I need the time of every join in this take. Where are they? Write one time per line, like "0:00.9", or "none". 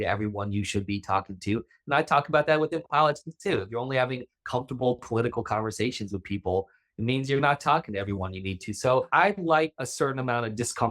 0:09.1
0:09.8